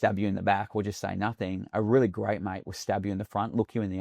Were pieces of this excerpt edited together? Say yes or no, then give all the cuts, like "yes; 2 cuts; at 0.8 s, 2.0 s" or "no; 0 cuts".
no; 0 cuts